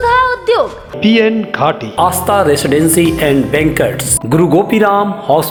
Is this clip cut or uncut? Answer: uncut